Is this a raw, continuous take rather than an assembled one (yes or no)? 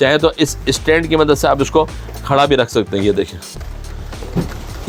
yes